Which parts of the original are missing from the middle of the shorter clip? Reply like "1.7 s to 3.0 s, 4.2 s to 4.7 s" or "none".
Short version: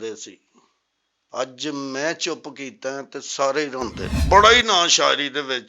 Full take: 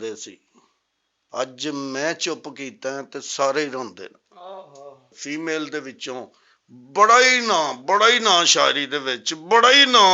4.2 s to 7.8 s